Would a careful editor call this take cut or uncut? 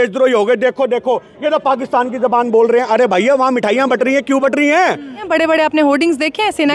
cut